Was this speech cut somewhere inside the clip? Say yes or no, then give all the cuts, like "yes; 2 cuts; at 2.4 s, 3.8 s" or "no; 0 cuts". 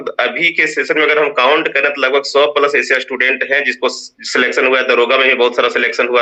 no; 0 cuts